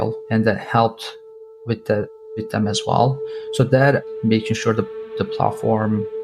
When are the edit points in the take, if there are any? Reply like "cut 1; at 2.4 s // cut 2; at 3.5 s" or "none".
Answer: cut 1; at 4.1 s